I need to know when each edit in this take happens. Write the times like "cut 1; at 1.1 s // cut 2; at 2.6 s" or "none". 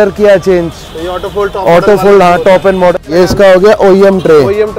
cut 1; at 2.9 s